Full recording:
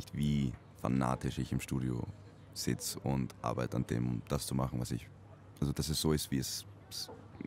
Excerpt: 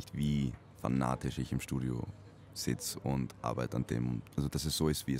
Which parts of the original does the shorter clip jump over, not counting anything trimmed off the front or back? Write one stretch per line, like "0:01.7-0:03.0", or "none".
0:04.2-0:05.5